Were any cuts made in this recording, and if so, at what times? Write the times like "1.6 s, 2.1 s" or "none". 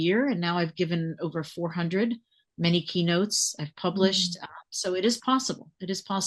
none